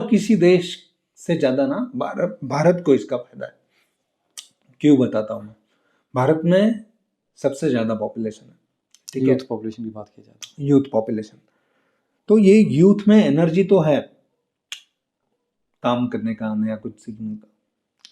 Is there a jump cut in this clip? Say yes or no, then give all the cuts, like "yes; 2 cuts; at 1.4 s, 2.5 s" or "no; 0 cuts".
no; 0 cuts